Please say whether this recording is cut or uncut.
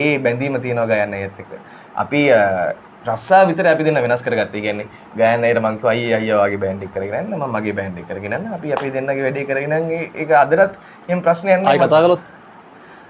uncut